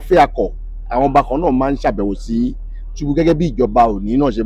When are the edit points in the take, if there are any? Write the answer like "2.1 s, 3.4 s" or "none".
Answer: none